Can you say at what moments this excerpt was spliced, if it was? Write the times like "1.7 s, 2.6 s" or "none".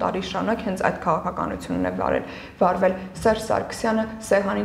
none